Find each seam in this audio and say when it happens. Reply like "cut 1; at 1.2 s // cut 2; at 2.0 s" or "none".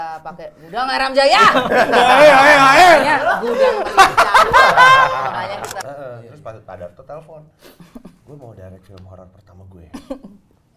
cut 1; at 5.8 s